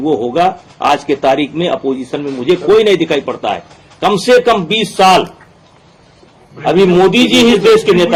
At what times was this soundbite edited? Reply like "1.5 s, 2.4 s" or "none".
none